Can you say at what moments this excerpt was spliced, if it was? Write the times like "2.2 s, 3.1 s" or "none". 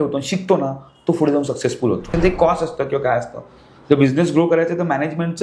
2.1 s